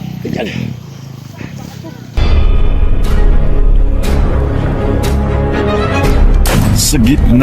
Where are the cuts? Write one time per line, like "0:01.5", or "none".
0:02.1